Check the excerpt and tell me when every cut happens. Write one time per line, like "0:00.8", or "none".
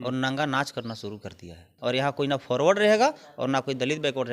0:01.7